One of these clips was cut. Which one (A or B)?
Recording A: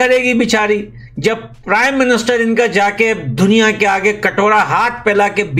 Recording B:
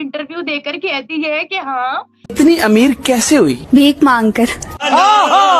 B